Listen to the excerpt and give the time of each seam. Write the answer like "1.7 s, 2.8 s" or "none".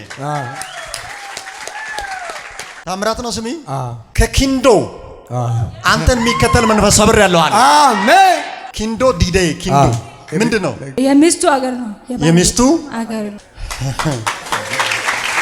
4.0 s